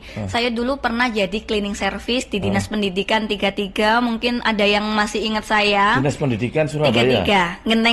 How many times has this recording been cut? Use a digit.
0